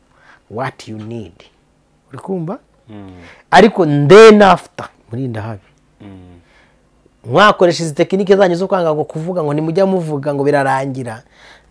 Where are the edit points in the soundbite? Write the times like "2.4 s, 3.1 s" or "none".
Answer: 5.0 s